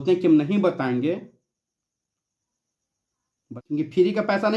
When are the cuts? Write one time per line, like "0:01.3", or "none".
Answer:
none